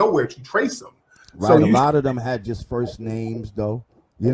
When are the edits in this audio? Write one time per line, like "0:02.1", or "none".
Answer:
0:02.8